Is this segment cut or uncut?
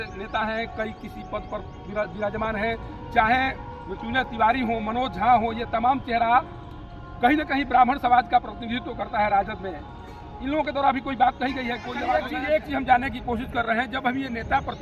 cut